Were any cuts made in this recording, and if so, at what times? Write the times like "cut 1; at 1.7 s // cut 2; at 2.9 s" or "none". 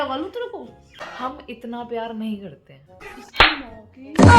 cut 1; at 1.0 s // cut 2; at 3.0 s